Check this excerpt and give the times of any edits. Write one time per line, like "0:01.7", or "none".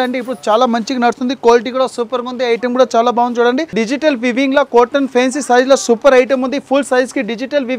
0:03.7